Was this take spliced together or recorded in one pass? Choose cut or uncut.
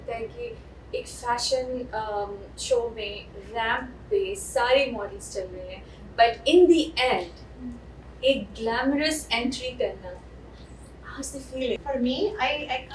cut